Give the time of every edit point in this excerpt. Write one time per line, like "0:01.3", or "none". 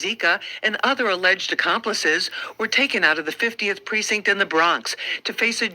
0:01.8